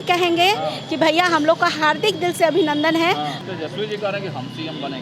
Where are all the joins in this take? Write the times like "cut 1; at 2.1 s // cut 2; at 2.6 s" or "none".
cut 1; at 3.4 s